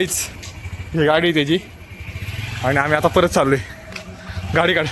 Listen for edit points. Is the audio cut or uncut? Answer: uncut